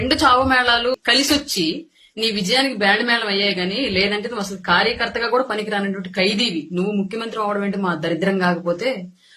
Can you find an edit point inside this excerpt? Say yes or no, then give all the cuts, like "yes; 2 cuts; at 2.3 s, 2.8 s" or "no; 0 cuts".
yes; 1 cut; at 1.0 s